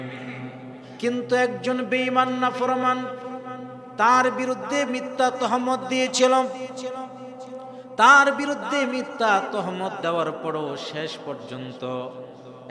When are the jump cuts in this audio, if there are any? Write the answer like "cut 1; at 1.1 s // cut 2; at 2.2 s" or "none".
none